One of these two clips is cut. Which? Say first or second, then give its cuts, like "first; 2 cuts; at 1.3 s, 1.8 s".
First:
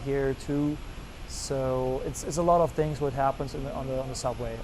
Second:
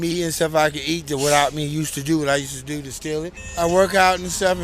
second; 1 cut; at 3.4 s